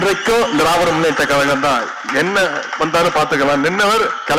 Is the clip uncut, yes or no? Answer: yes